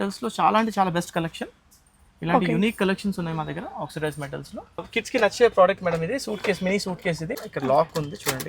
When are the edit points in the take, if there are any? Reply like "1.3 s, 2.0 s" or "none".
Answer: 4.9 s, 7.3 s